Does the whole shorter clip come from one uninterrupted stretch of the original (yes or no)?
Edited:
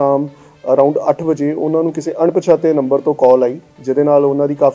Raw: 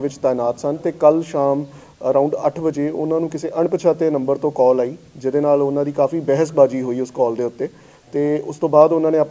yes